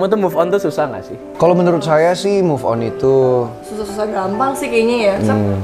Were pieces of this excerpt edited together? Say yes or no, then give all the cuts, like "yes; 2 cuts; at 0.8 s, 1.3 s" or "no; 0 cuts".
no; 0 cuts